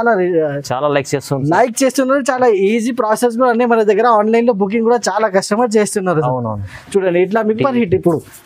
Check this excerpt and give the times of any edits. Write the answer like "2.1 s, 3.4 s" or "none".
7.6 s